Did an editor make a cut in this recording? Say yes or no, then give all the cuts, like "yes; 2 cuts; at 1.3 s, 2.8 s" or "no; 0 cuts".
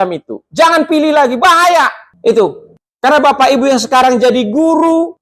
no; 0 cuts